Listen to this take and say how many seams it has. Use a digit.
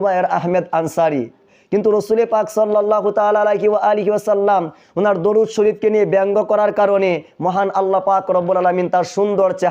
0